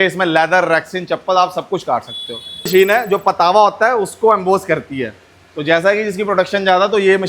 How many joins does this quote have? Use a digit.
1